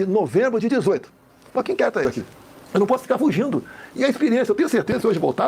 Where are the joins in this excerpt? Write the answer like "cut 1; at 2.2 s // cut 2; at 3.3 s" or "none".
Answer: cut 1; at 2.1 s